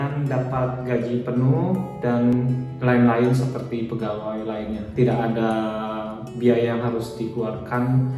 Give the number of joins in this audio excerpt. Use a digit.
0